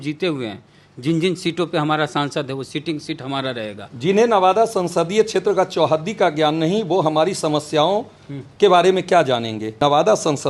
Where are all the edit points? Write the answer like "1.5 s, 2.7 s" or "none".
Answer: 3.9 s, 9.8 s